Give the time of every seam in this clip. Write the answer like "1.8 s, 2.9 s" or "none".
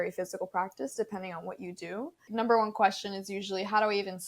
2.3 s